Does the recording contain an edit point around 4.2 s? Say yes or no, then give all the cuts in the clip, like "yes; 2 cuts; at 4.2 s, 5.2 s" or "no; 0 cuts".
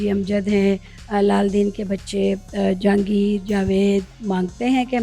yes; 2 cuts; at 0.9 s, 4.2 s